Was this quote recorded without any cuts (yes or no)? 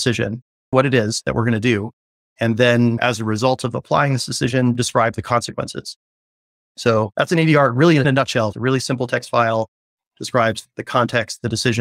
no